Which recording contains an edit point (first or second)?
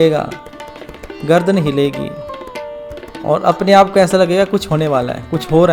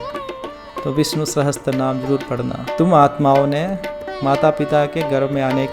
second